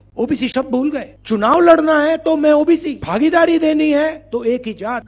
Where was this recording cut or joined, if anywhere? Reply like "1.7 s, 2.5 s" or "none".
1.1 s, 3.0 s, 4.2 s